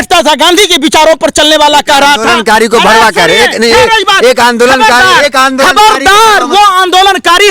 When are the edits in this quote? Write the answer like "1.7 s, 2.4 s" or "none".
none